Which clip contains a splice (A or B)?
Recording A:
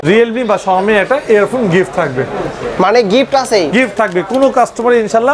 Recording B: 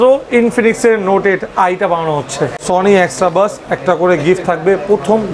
B